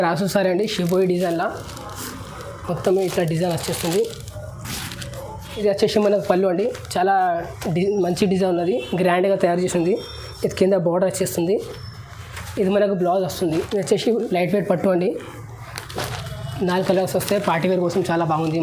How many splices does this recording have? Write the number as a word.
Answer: two